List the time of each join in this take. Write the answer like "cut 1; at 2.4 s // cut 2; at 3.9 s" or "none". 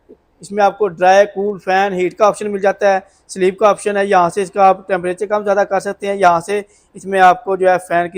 none